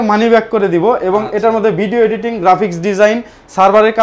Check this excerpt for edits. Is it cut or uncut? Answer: uncut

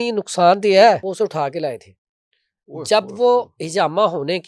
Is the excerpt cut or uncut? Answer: cut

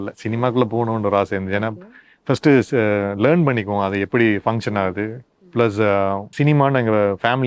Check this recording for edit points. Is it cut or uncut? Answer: cut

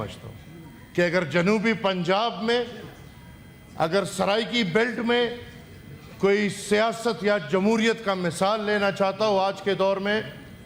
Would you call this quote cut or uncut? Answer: uncut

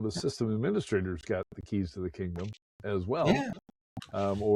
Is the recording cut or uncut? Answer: uncut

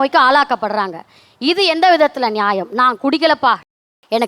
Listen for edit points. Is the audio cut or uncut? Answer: uncut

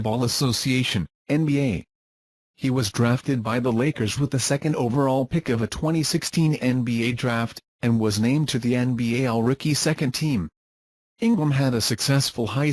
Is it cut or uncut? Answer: cut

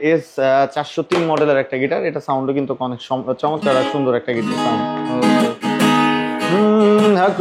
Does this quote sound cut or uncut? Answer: uncut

